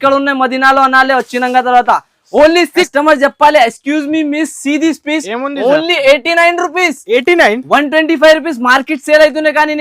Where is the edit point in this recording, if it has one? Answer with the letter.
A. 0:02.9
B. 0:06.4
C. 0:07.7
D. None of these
A